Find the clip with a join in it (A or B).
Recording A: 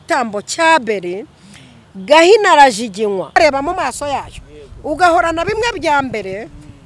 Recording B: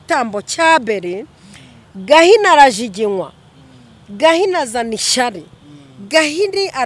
A